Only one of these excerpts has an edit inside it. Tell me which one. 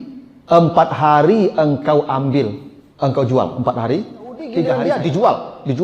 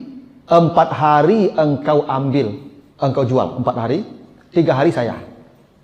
first; 1 cut; at 4.7 s

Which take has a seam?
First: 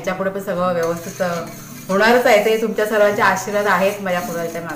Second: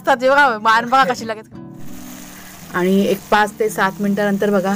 second; 1 cut; at 1.3 s

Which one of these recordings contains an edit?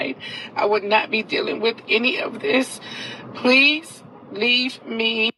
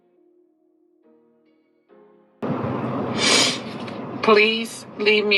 second; 1 cut; at 1.7 s

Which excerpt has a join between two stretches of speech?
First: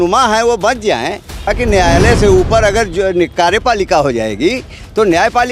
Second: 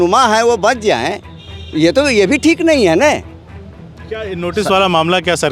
first; 1 cut; at 1.5 s

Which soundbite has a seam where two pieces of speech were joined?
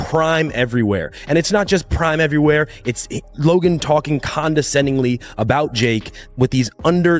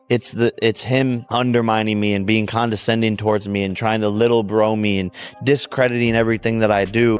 second; 1 cut; at 1.2 s

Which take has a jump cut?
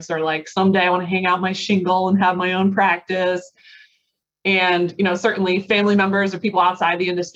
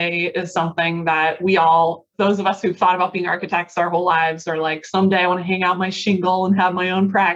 second; 1 cut; at 2.0 s

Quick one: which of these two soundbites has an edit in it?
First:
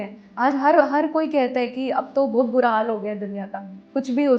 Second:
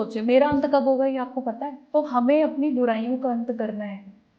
second; 1 cut; at 1.7 s

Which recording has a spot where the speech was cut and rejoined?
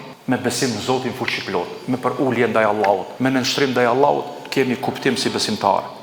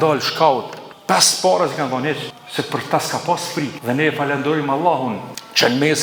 first; 1 cut; at 3.1 s

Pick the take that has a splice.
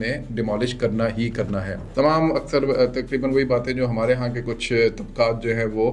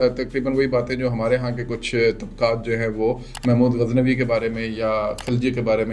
first; 1 cut; at 1.8 s

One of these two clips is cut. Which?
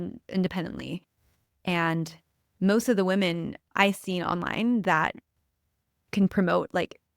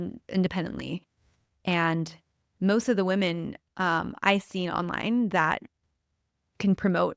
first; 1 cut; at 3.6 s

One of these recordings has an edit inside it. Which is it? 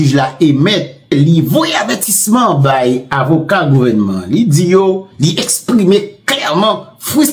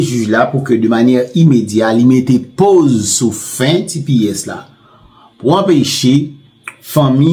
first; 1 cut; at 1.1 s

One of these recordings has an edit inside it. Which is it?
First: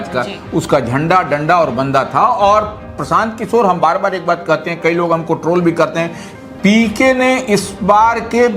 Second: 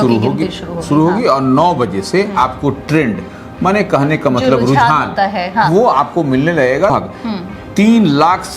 second; 1 cut; at 6.9 s

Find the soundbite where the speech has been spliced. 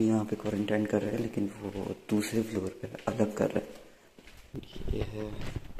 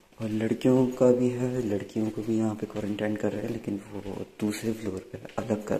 first; 1 cut; at 4.5 s

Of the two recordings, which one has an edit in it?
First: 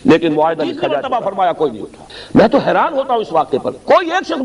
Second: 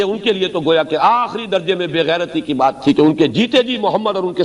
first; 1 cut; at 0.9 s

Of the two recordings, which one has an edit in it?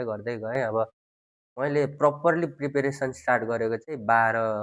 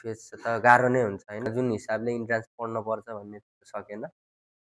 second; 1 cut; at 1.5 s

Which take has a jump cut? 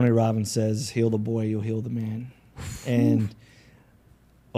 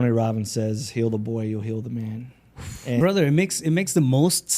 second; 1 cut; at 3.0 s

